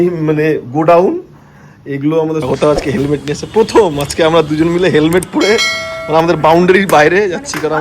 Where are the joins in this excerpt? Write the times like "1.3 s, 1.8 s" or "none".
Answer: 2.5 s